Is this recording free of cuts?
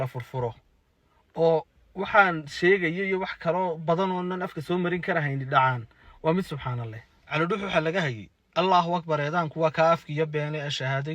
no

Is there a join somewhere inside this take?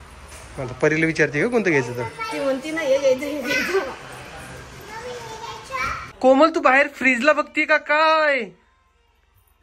yes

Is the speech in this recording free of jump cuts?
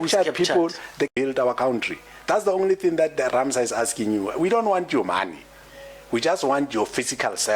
no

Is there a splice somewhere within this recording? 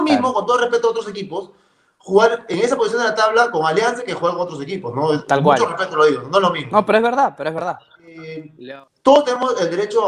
no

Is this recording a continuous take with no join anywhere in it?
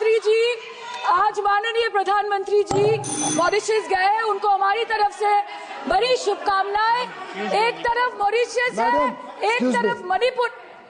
yes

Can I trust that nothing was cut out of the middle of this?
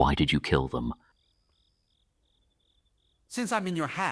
yes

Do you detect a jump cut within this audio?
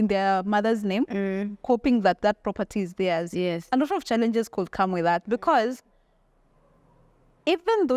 no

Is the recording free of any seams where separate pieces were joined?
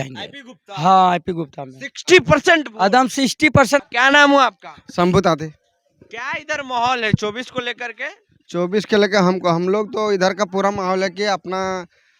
yes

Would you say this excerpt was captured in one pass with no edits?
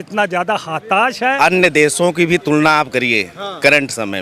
no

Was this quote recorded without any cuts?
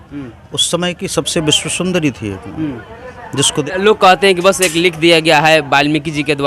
no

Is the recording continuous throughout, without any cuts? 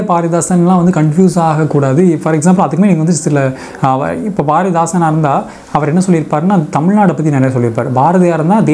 yes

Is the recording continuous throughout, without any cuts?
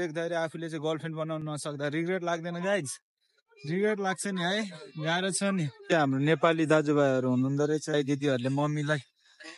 no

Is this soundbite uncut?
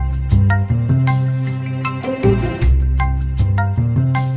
yes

